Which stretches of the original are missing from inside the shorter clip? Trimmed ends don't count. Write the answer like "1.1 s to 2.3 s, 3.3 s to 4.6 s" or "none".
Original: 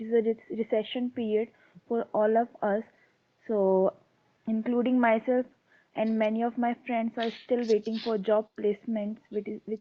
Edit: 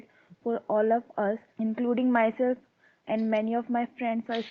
2.9 s to 4.4 s